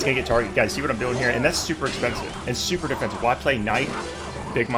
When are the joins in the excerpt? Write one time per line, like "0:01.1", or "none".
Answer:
none